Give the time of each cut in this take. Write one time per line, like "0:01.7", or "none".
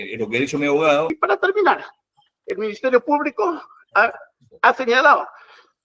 0:01.1